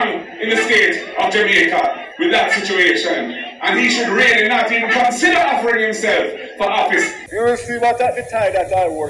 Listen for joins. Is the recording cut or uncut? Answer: cut